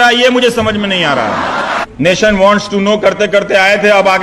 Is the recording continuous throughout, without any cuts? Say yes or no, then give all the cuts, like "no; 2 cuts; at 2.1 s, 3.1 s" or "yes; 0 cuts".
no; 1 cut; at 1.8 s